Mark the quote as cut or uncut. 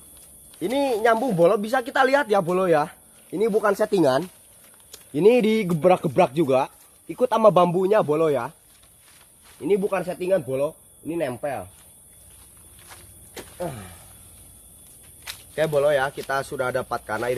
uncut